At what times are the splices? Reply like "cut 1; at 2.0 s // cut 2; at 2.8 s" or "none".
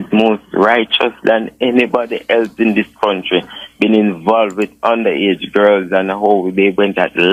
none